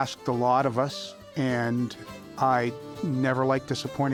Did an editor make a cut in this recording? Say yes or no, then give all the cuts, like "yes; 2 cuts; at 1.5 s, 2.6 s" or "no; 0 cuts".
no; 0 cuts